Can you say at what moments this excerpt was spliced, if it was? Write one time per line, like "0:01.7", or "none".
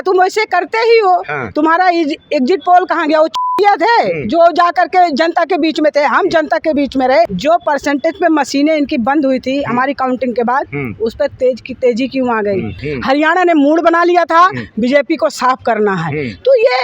0:07.3
0:12.8